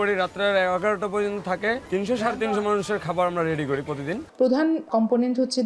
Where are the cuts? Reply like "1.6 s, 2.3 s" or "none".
1.8 s, 4.2 s, 4.9 s